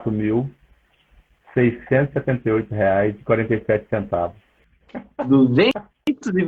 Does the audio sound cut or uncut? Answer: uncut